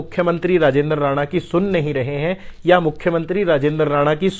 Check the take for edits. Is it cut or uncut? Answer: uncut